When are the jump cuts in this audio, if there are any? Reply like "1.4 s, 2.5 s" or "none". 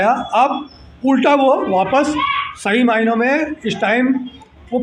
none